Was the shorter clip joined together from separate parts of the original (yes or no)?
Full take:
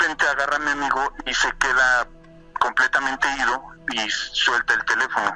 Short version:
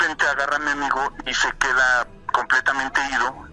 yes